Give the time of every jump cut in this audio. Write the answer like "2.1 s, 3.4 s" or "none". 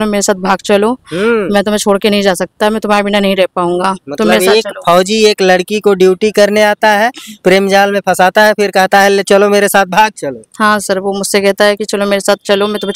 none